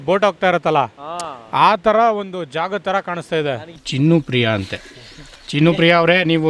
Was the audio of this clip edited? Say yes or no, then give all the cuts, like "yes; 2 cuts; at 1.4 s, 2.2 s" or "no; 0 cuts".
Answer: yes; 1 cut; at 3.7 s